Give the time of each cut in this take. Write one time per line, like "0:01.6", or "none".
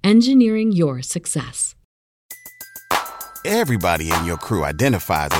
0:02.1